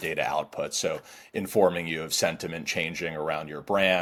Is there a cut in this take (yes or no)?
no